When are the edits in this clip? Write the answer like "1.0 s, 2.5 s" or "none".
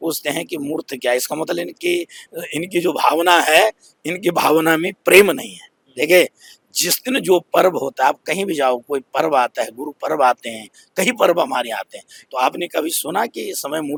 none